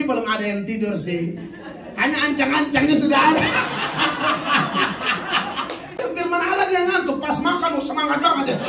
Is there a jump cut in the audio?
yes; 1 cut; at 6.0 s

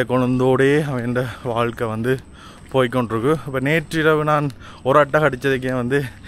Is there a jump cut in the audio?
no; 0 cuts

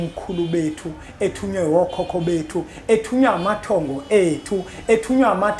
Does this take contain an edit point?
no; 0 cuts

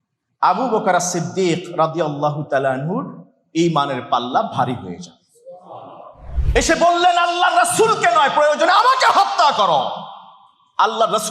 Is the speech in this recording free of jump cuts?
no; 1 cut; at 6.3 s

